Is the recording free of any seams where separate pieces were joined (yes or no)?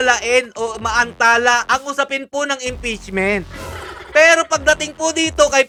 yes